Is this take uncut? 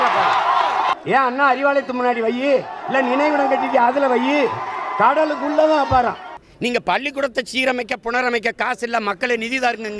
no; 2 cuts; at 0.9 s, 6.4 s

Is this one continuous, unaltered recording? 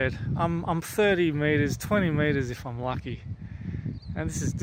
yes; 0 cuts

